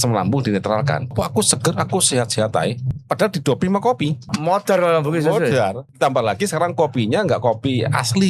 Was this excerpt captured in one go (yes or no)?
no